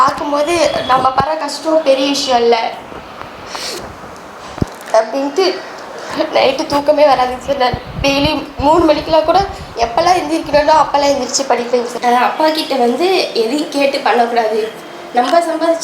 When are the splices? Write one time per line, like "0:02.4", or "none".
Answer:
0:11.9